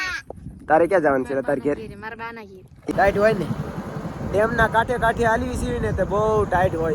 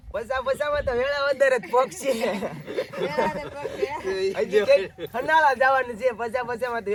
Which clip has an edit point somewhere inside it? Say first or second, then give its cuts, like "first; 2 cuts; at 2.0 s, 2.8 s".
first; 1 cut; at 2.9 s